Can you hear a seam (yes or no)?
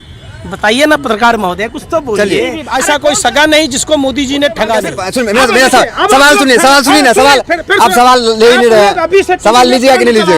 yes